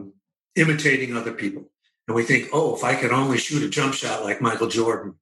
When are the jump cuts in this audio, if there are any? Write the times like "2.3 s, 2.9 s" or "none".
none